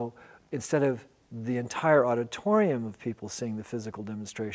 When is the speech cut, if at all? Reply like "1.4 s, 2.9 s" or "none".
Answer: none